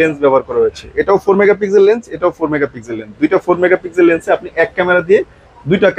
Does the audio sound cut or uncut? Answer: uncut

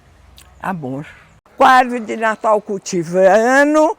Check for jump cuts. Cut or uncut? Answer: cut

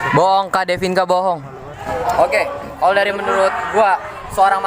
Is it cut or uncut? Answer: cut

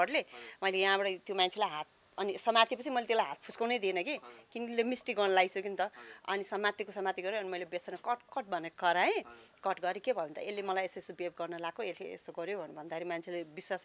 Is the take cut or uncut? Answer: uncut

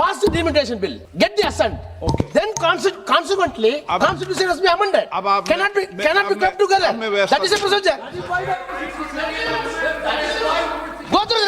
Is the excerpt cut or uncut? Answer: cut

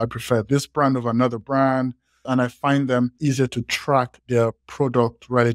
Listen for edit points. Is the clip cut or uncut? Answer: cut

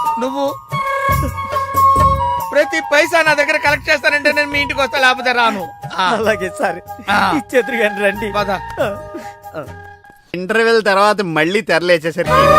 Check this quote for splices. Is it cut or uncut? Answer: cut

